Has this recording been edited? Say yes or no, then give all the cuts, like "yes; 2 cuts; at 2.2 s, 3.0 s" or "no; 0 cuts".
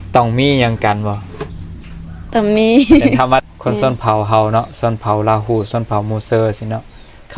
yes; 1 cut; at 3.4 s